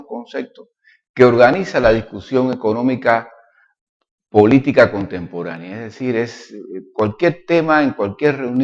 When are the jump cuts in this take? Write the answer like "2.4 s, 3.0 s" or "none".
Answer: 5.1 s

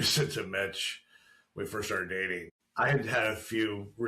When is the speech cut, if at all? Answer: 2.6 s

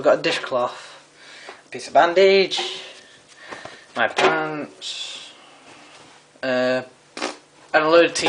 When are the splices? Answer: none

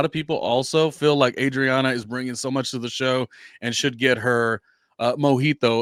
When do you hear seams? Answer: none

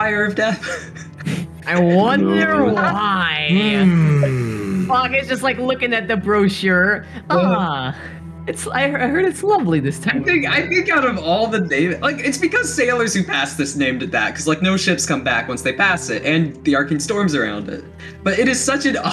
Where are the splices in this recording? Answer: none

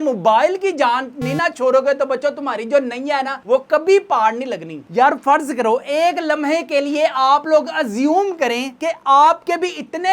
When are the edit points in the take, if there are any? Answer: 4.8 s

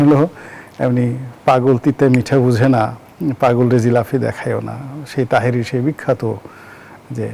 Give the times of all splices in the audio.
none

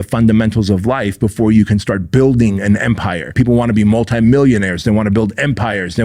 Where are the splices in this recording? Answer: 3.3 s

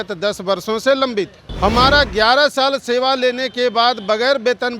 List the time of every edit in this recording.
1.4 s

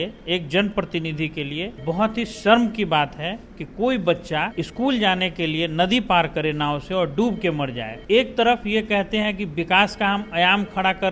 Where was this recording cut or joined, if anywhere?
1.7 s, 4.6 s, 8.0 s

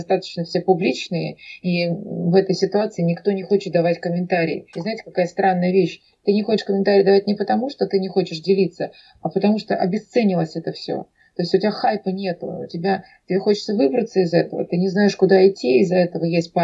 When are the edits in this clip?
4.7 s

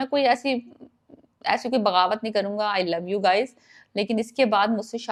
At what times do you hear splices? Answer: none

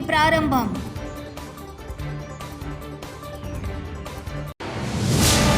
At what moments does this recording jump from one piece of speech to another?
none

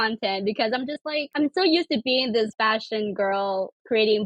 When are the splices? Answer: 1.3 s, 2.5 s

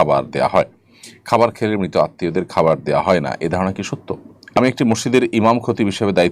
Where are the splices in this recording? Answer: 4.6 s

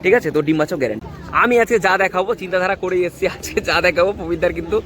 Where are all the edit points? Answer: 1.0 s

